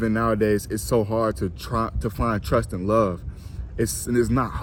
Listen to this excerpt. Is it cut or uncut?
uncut